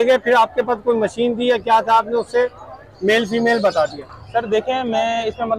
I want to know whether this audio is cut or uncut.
uncut